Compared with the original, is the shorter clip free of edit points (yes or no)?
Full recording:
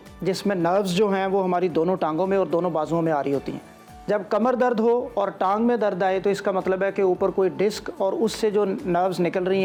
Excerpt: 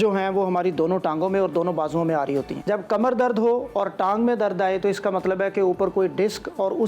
no